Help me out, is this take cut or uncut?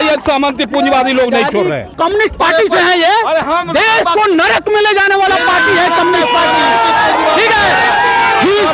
cut